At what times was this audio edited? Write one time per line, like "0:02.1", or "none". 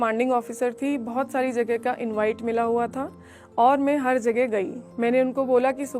0:04.8